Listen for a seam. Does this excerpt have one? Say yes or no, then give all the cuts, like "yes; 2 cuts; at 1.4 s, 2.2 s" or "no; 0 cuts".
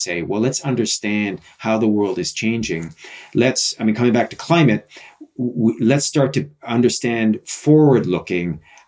no; 0 cuts